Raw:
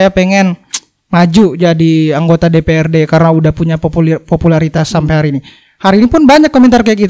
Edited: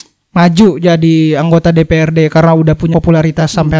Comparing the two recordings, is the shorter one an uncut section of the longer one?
no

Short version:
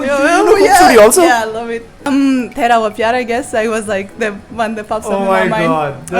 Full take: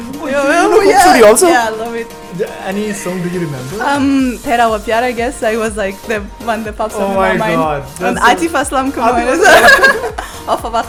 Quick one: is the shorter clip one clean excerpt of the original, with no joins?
no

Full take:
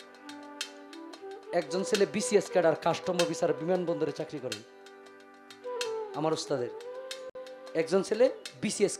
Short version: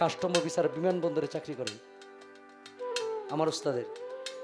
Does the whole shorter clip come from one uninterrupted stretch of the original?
yes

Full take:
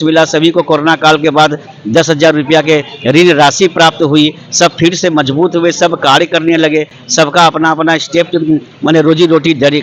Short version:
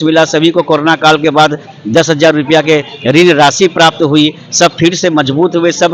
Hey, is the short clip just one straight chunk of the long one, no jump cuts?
yes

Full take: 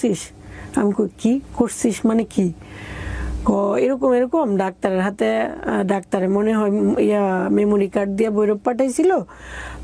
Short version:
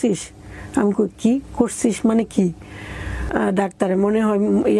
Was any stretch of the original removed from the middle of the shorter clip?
yes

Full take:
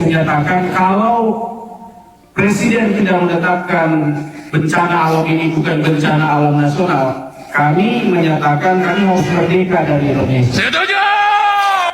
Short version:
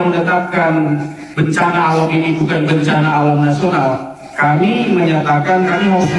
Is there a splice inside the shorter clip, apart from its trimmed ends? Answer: no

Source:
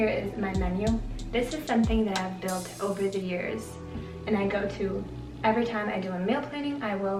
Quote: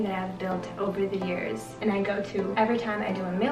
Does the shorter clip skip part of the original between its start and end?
yes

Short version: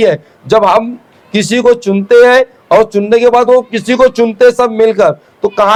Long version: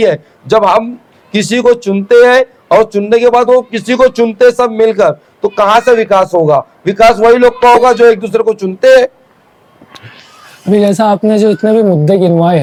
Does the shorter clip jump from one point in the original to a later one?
no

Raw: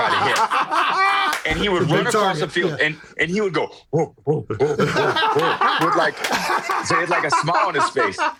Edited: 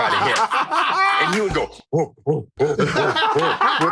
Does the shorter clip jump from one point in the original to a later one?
yes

